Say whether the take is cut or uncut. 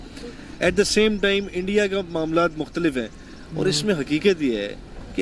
uncut